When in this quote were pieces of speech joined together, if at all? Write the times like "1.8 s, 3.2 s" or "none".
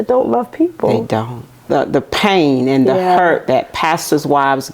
1.6 s